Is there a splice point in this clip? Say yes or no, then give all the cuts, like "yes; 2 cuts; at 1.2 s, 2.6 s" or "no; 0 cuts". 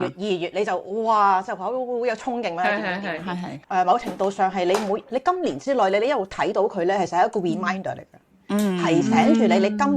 yes; 1 cut; at 3.5 s